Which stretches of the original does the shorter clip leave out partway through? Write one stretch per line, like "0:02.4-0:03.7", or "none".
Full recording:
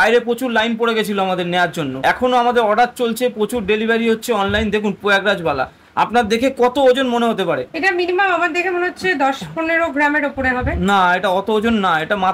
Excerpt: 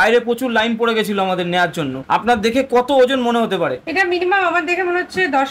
0:01.9-0:05.8